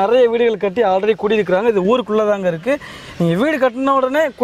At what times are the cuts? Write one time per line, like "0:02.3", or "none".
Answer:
none

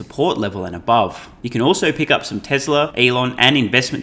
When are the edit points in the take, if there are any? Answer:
0:01.3
0:02.9

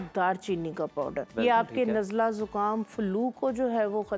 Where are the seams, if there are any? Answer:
0:01.3

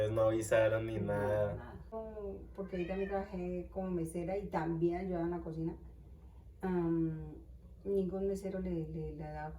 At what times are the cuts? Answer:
0:01.9

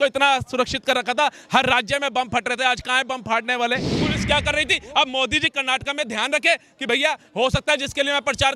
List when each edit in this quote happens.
0:03.9

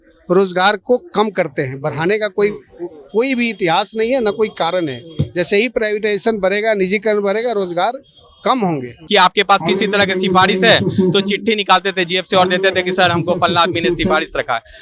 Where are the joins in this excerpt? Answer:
0:08.9

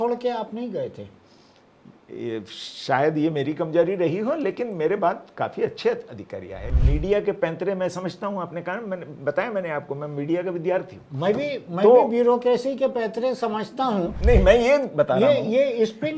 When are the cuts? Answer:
0:06.7
0:14.2

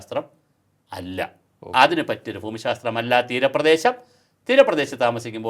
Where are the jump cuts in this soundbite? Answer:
none

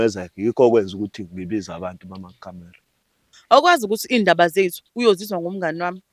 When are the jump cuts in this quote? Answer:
0:03.3

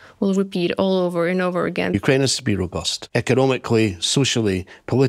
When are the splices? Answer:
0:01.9
0:02.9

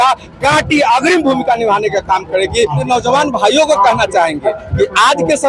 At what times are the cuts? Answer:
0:02.8

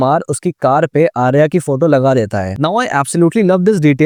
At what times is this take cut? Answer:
none

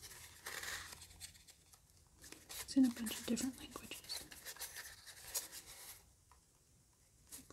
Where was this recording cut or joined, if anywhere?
none

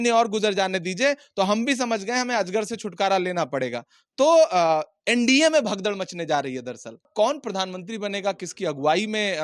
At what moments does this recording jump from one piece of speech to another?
0:07.1

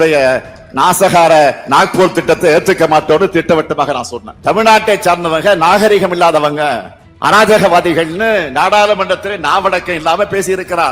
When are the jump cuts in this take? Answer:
0:04.3

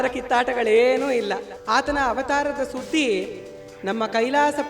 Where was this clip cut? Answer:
0:01.5

